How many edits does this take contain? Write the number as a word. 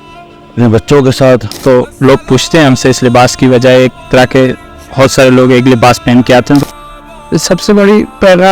two